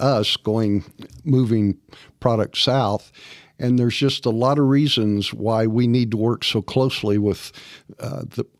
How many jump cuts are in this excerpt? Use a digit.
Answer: 0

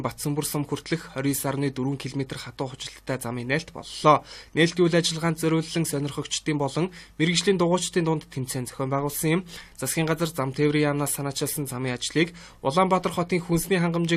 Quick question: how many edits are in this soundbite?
0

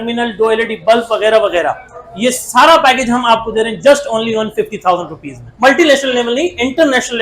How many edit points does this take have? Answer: 1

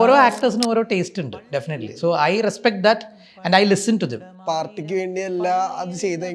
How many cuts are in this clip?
1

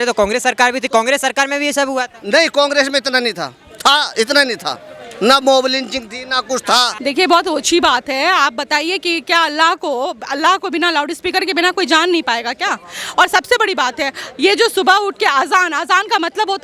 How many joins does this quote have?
1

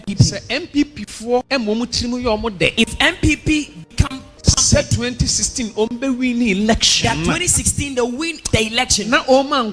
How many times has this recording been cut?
4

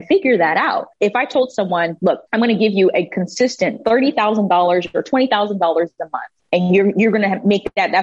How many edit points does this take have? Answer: 2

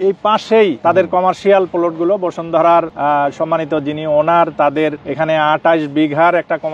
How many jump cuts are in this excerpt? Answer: 2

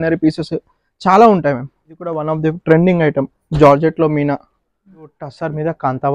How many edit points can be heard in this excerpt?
2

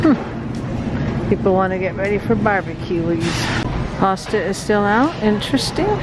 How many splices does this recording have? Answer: 0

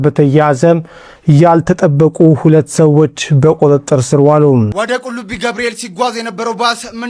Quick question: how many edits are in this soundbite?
1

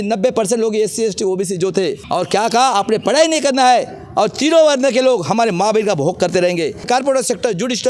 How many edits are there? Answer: 2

